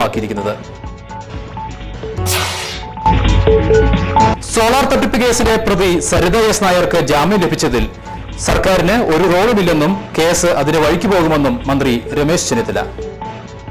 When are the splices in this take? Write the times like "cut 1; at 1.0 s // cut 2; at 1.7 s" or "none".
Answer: none